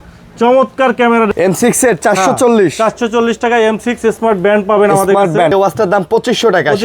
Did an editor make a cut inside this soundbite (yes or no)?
yes